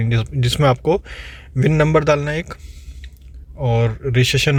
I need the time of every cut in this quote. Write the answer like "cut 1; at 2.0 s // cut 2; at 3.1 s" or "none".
none

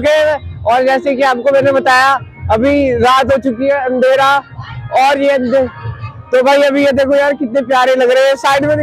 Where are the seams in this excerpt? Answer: none

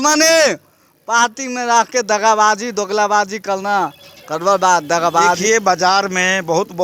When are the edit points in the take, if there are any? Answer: cut 1; at 5.4 s

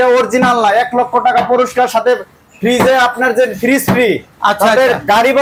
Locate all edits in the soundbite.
none

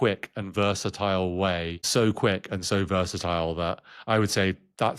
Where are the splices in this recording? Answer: cut 1; at 1.8 s

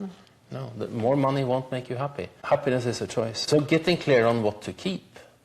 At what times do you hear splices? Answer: cut 1; at 2.3 s // cut 2; at 3.4 s

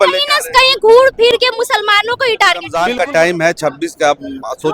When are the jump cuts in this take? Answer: cut 1; at 2.8 s

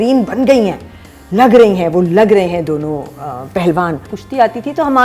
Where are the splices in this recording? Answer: cut 1; at 4.2 s

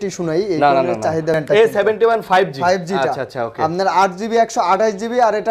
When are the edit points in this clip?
cut 1; at 1.4 s

